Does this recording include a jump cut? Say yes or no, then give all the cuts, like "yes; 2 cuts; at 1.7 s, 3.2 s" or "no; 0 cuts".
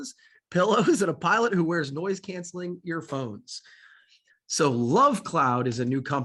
no; 0 cuts